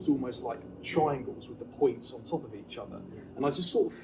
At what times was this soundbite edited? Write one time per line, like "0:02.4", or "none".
none